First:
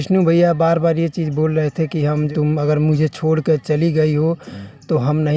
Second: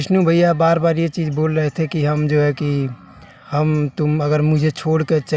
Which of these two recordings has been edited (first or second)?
first